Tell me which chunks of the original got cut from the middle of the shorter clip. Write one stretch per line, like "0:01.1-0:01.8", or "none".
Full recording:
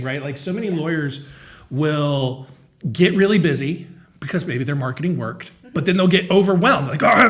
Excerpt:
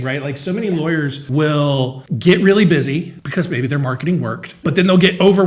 0:01.2-0:01.6
0:02.5-0:02.8
0:03.9-0:04.1
0:05.4-0:05.5